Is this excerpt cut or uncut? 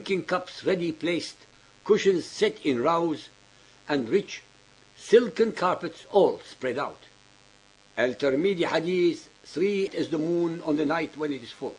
uncut